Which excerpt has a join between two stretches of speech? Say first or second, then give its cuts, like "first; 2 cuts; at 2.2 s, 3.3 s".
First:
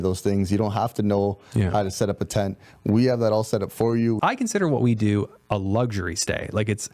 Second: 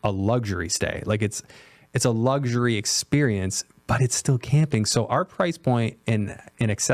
first; 1 cut; at 4.2 s